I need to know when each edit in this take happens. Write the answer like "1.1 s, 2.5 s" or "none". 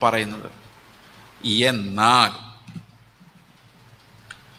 none